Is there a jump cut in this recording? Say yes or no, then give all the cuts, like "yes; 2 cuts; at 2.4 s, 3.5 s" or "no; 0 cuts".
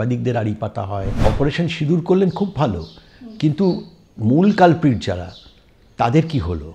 yes; 1 cut; at 1.2 s